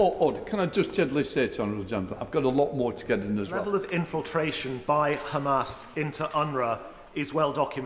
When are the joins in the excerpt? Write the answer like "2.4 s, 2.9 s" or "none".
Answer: 3.6 s